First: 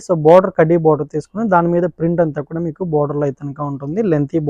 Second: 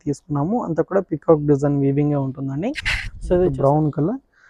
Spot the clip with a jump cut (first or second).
second